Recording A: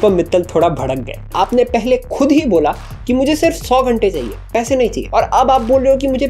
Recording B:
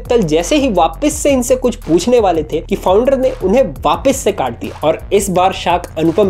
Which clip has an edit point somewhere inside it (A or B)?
A